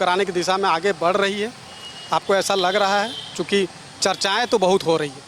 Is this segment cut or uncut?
uncut